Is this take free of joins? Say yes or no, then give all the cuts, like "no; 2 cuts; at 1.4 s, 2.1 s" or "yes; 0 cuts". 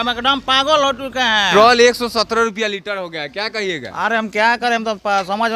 no; 1 cut; at 1.5 s